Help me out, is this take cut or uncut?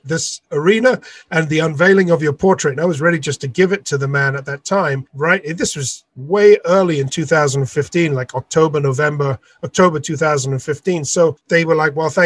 uncut